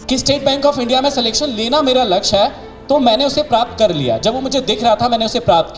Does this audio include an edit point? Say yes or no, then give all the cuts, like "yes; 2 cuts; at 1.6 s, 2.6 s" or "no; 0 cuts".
no; 0 cuts